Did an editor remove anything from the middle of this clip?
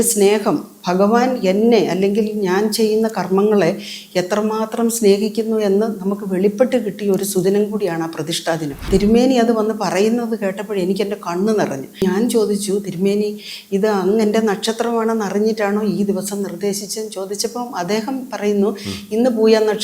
yes; 2 cuts; at 8.9 s, 12.0 s

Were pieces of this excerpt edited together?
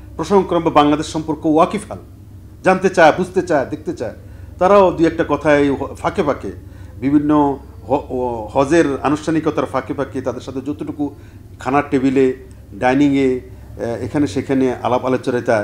no; 0 cuts

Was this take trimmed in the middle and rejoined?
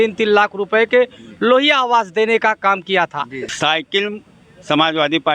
yes; 1 cut; at 3.4 s

